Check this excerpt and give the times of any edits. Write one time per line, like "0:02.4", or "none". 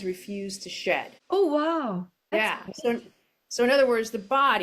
0:01.1
0:02.2